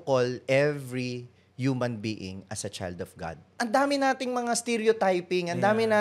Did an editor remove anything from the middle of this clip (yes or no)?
yes